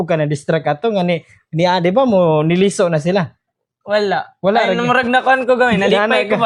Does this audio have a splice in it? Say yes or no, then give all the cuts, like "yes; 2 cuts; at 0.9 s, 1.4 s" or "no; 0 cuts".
no; 0 cuts